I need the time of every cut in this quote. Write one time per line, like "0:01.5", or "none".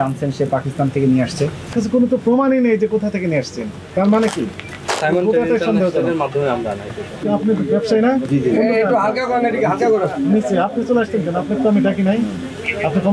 0:01.7